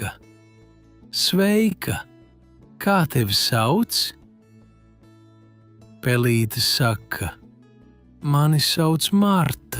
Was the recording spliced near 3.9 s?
yes; 2 cuts; at 3.9 s, 5.9 s

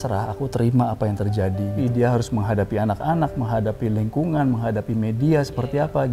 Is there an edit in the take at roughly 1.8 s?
yes; 1 cut; at 1.8 s

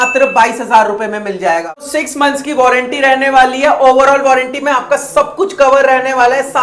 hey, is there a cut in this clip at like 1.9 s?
yes; 1 cut; at 1.9 s

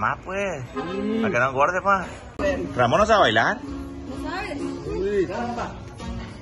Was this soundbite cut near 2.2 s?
yes; 1 cut; at 2.2 s

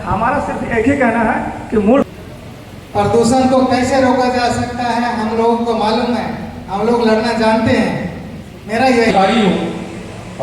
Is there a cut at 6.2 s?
no; 2 cuts; at 2.0 s, 9.1 s

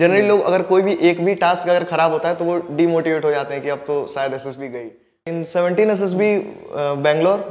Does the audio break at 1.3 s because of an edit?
no; 1 cut; at 5.3 s

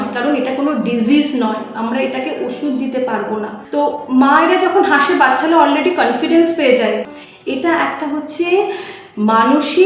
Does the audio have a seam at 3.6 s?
yes; 2 cuts; at 3.6 s, 7.1 s

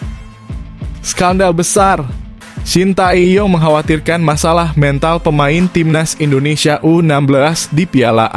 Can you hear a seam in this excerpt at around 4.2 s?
no; 1 cut; at 1.1 s

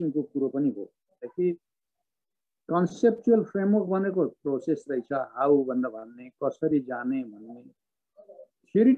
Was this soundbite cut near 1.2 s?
yes; 1 cut; at 1.2 s

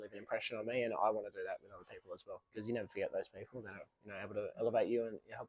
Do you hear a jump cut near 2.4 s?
yes; 1 cut; at 2.4 s

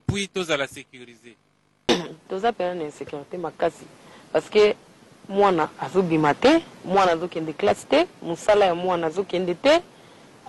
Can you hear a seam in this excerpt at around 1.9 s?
yes; 1 cut; at 1.9 s

